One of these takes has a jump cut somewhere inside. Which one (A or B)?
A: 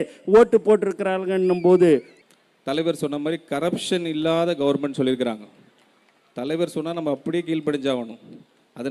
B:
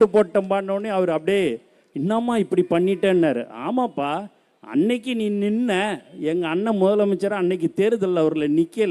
A